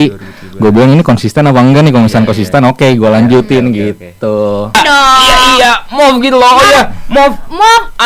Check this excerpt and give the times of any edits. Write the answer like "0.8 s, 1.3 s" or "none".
4.7 s